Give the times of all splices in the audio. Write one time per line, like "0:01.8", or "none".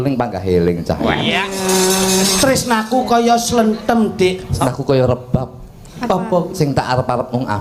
0:04.6